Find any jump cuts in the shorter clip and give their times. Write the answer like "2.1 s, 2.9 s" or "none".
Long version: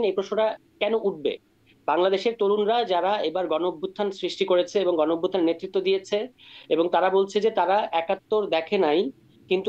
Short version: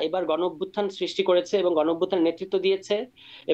none